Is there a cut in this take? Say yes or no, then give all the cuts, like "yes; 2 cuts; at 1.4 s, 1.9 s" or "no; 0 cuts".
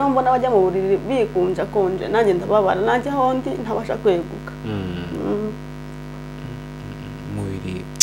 no; 0 cuts